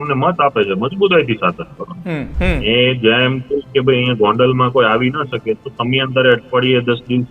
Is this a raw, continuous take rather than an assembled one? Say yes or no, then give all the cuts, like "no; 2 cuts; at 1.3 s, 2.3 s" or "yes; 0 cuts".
no; 1 cut; at 2.3 s